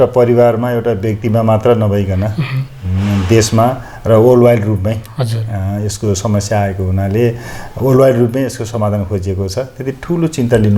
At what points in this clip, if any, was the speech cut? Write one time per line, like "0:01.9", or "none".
none